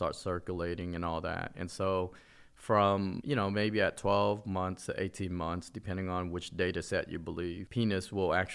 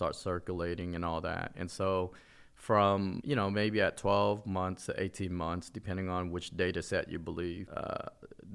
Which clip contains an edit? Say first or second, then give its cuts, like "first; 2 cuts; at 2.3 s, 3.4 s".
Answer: first; 1 cut; at 7.6 s